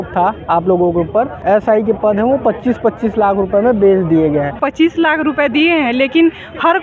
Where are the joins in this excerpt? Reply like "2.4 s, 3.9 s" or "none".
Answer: 1.4 s, 4.6 s